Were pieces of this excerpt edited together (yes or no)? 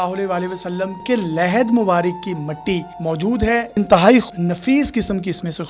yes